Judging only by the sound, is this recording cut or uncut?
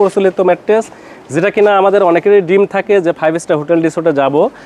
uncut